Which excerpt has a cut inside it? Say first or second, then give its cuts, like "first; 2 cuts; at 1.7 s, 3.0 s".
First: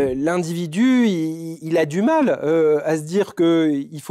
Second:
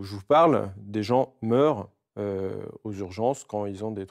first; 1 cut; at 1.5 s